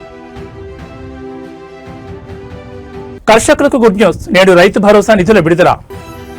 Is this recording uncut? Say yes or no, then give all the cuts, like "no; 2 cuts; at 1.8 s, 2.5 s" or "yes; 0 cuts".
no; 1 cut; at 3.1 s